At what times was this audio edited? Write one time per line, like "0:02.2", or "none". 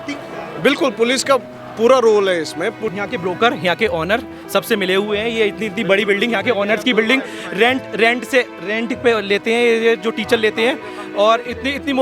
0:02.8